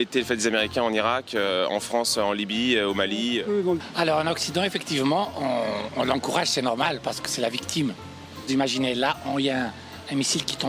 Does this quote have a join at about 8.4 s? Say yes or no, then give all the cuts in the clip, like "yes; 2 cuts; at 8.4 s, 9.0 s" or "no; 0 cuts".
yes; 2 cuts; at 3.8 s, 8.4 s